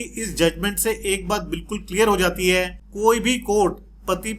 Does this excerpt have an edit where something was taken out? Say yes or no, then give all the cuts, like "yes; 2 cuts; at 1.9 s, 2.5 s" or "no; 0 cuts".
yes; 1 cut; at 2.8 s